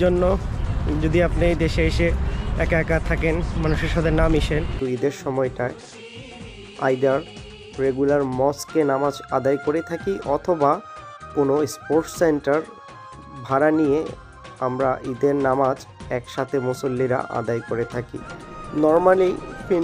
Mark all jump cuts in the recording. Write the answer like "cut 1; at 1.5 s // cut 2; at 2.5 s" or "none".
cut 1; at 4.8 s // cut 2; at 18.2 s

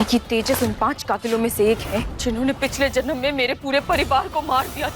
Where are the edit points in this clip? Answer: cut 1; at 2.1 s

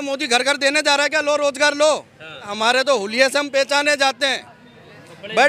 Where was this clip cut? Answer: cut 1; at 2.5 s

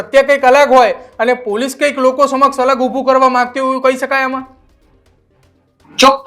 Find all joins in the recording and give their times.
none

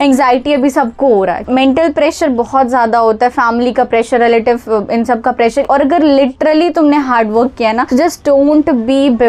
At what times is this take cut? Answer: cut 1; at 1.5 s // cut 2; at 5.7 s

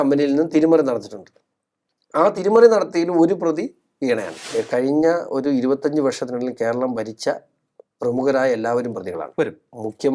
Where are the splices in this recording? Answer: cut 1; at 4.5 s

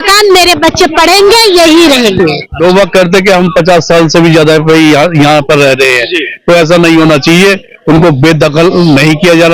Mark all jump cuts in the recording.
cut 1; at 2.6 s

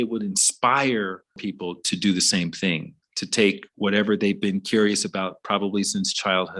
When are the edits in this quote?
cut 1; at 1.5 s

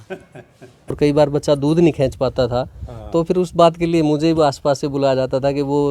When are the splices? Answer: cut 1; at 0.9 s

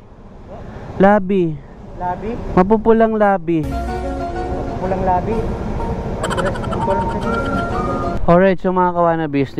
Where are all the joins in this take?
cut 1; at 8.2 s

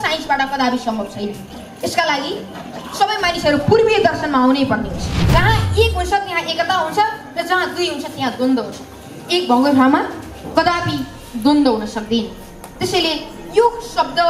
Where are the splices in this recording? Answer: cut 1; at 5.3 s

